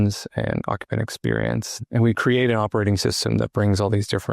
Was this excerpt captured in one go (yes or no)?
no